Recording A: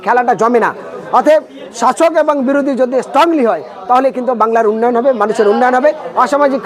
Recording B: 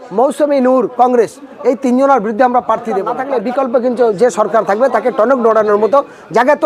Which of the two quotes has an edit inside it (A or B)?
B